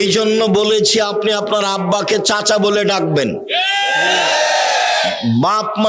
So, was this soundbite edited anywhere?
no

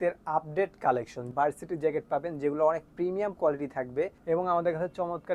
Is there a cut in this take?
yes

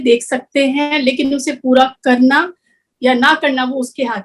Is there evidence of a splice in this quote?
no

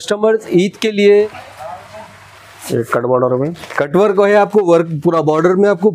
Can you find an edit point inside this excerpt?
yes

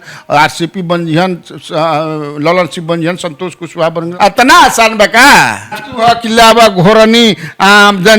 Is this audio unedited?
no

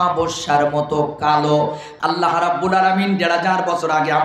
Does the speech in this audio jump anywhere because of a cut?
yes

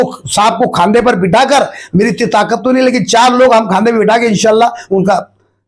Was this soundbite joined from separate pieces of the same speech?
no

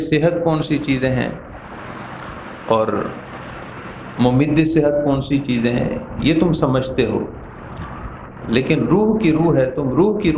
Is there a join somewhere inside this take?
no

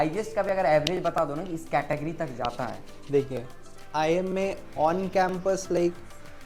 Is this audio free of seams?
yes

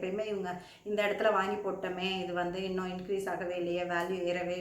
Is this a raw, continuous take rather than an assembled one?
yes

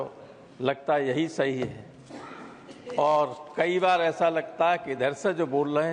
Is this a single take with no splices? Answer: yes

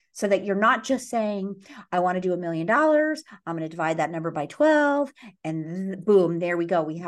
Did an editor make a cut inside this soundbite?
no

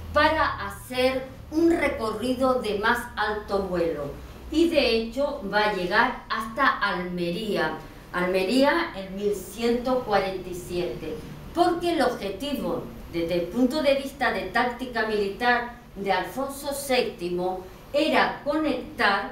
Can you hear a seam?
yes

